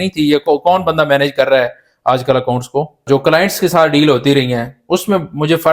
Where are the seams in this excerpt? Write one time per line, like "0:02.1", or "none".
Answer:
0:03.0